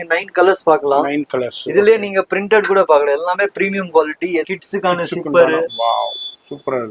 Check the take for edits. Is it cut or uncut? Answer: cut